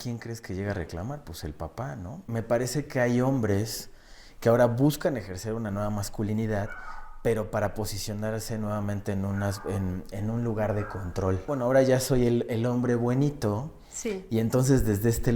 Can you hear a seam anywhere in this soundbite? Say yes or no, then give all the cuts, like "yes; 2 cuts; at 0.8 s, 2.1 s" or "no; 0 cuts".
yes; 2 cuts; at 2.2 s, 11.5 s